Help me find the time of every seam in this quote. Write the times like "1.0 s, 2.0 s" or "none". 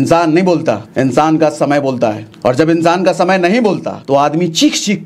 0.9 s, 2.3 s, 3.9 s